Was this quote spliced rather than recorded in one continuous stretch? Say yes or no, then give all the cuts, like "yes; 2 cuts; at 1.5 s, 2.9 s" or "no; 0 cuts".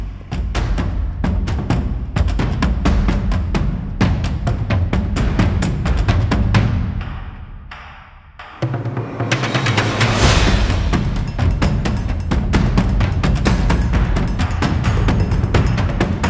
no; 0 cuts